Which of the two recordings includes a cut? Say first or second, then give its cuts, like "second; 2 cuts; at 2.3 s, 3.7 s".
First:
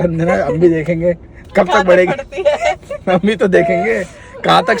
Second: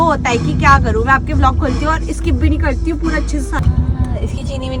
second; 1 cut; at 3.5 s